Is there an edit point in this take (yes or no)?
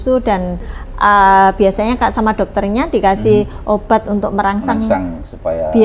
no